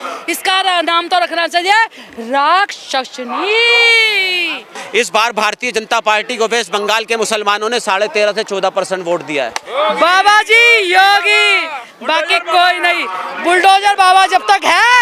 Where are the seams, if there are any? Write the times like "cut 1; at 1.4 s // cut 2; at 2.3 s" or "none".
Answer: cut 1; at 4.8 s // cut 2; at 9.6 s